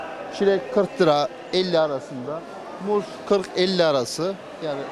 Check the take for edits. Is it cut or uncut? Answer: uncut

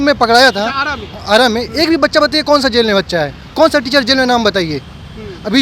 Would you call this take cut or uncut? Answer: uncut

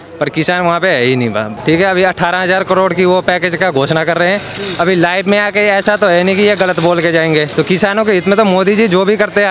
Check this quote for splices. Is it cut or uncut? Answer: cut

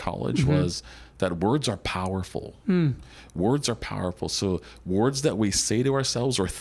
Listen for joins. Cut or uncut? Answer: uncut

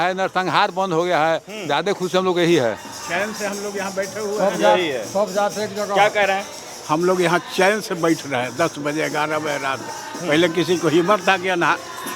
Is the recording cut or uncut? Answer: uncut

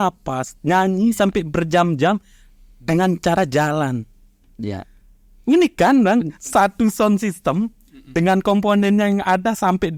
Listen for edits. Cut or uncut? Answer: uncut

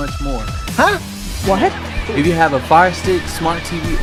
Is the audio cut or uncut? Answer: uncut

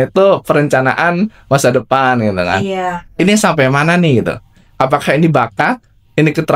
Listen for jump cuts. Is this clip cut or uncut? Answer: uncut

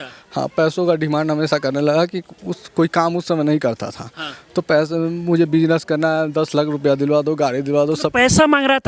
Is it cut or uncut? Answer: uncut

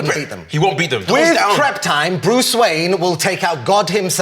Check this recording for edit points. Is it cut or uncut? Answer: cut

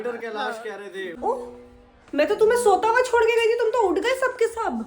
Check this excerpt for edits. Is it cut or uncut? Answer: cut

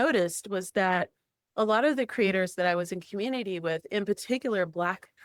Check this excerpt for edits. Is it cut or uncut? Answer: uncut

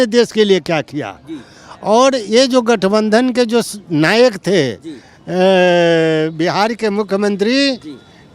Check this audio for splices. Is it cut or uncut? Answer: uncut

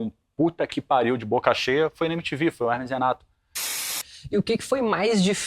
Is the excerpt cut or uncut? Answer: cut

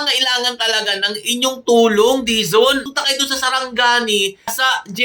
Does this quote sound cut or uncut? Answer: cut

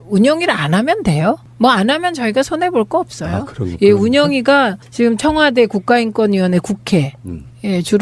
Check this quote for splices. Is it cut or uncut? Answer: uncut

